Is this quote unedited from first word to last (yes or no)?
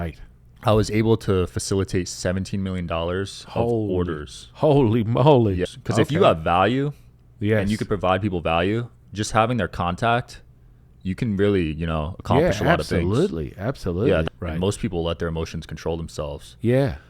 no